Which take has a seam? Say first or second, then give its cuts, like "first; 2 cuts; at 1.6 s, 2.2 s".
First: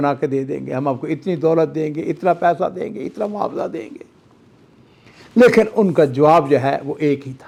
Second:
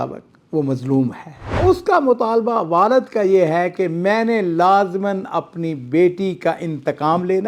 second; 1 cut; at 1.6 s